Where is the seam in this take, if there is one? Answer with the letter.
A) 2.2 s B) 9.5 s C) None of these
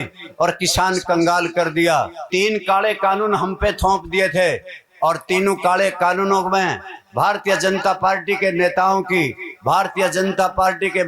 A